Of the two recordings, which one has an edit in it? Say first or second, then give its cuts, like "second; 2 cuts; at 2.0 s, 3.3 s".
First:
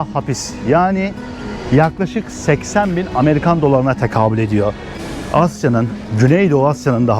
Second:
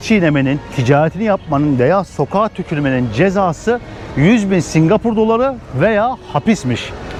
first; 1 cut; at 5.0 s